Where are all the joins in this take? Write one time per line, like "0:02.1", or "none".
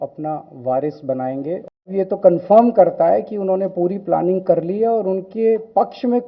0:01.8